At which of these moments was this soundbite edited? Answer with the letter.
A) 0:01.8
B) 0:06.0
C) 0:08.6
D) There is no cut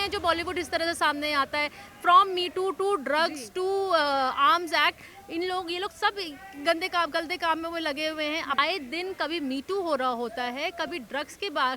C